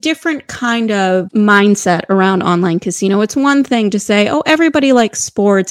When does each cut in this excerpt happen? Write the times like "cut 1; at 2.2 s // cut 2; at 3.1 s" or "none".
cut 1; at 1.3 s